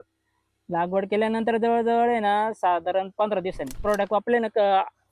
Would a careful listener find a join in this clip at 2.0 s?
no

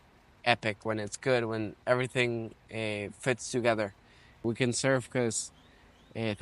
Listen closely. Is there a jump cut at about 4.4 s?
yes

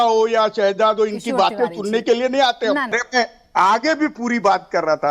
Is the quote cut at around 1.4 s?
no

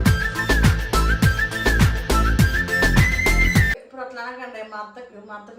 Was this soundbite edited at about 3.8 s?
yes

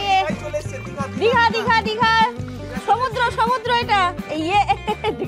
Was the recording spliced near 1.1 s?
no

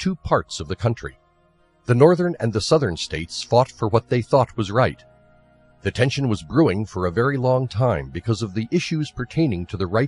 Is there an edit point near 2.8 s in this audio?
yes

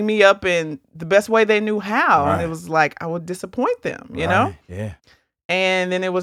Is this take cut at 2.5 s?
no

